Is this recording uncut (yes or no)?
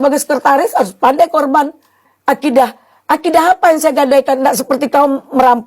no